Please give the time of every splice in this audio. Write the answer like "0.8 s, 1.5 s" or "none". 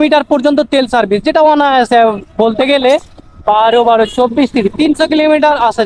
none